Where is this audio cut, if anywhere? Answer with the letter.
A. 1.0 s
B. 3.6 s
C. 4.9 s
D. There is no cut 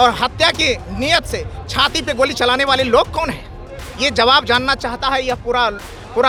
D